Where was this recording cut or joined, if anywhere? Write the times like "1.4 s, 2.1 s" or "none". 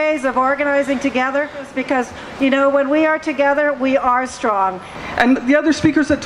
1.7 s, 4.9 s